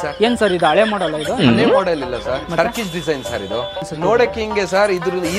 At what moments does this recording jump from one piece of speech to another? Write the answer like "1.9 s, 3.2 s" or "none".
3.8 s